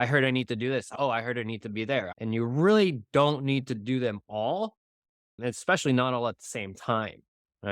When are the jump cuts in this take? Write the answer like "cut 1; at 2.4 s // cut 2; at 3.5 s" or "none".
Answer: cut 1; at 0.9 s // cut 2; at 2.1 s

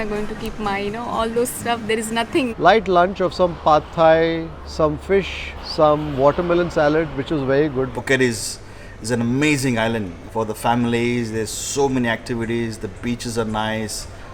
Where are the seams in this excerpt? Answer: cut 1; at 2.5 s // cut 2; at 7.9 s // cut 3; at 10.2 s

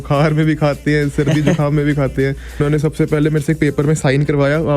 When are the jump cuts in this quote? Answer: cut 1; at 2.6 s

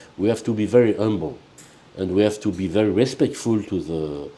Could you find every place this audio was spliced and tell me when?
none

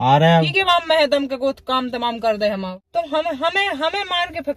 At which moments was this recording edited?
cut 1; at 2.8 s

